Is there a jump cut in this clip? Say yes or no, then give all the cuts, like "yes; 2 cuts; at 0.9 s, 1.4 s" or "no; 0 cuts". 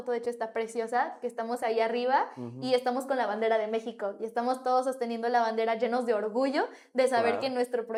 no; 0 cuts